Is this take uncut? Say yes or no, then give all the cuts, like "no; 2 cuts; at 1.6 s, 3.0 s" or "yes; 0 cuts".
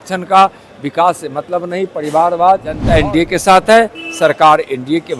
no; 1 cut; at 2.8 s